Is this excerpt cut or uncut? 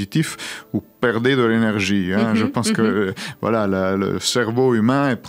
uncut